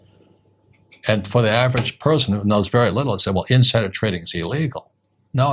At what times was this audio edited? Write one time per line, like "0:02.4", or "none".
none

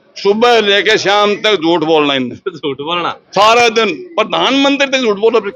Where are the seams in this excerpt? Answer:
none

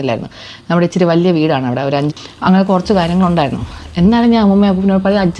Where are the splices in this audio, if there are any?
0:02.2

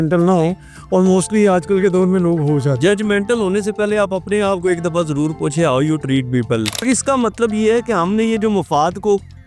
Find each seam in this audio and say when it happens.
0:06.8

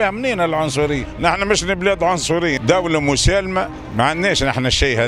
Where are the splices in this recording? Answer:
0:01.1
0:02.6
0:03.8

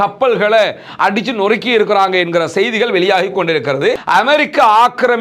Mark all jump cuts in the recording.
0:04.0

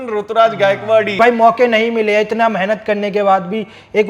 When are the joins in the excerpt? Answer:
0:01.2

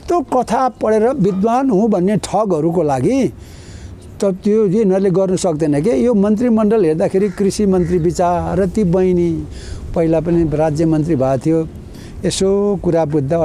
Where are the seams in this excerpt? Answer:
none

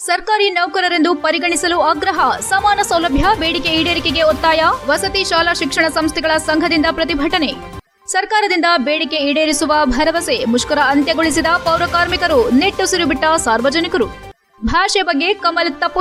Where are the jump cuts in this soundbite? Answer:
none

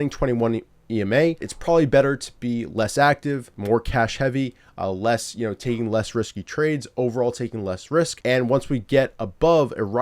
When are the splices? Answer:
0:01.5
0:03.5
0:08.2

